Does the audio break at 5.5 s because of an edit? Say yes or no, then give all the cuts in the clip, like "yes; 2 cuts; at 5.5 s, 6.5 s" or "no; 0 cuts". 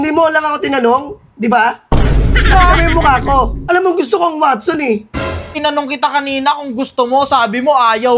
yes; 2 cuts; at 3.6 s, 5.5 s